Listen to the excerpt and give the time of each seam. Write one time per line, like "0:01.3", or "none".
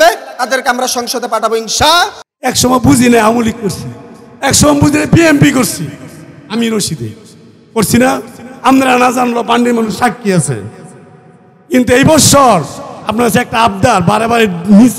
0:02.2